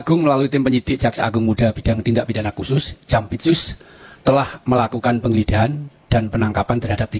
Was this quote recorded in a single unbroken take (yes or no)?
yes